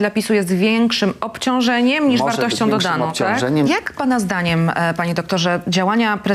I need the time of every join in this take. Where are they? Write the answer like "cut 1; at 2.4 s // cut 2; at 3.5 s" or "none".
cut 1; at 3.7 s